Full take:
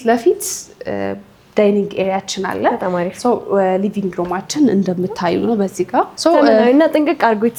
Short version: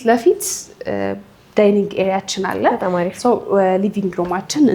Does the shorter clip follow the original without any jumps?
yes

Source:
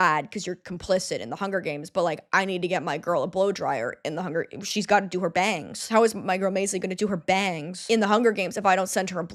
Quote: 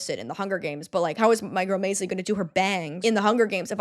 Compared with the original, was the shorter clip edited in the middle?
yes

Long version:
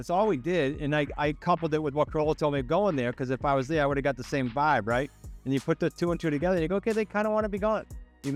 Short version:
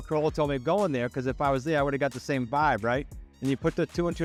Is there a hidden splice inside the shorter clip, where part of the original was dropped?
no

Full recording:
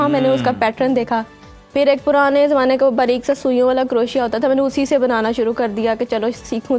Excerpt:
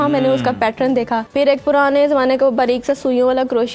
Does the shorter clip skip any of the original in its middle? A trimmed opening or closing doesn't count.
yes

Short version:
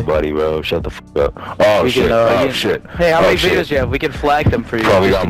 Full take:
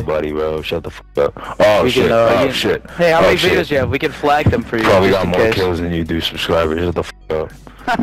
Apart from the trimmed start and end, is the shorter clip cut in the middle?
no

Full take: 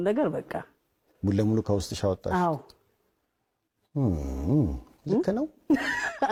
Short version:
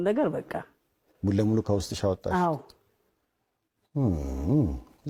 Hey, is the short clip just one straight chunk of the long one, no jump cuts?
yes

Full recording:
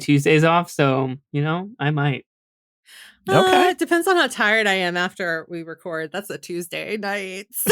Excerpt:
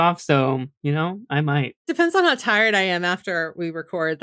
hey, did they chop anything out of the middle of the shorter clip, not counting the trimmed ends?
yes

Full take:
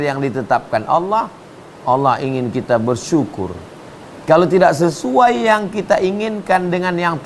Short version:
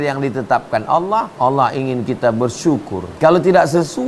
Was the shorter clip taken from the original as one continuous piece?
no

